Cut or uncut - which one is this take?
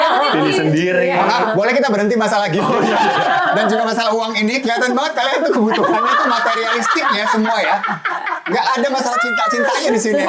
uncut